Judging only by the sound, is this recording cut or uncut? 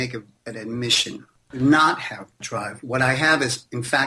cut